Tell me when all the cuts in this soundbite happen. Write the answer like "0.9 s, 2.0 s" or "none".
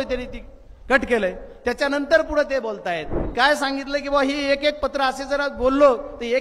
3.2 s